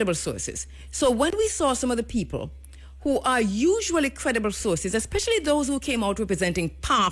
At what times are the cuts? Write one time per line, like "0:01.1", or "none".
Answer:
none